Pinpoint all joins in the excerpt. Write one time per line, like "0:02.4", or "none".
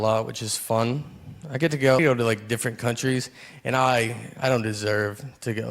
0:02.0